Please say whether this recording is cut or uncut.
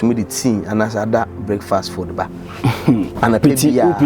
cut